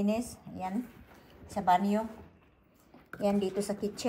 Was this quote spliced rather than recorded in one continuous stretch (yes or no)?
no